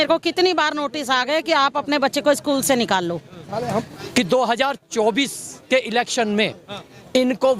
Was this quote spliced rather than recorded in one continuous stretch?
yes; 1 cut; at 3.9 s

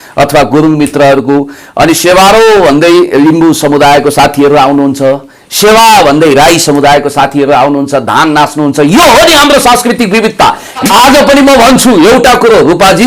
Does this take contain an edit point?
yes; 1 cut; at 10.8 s

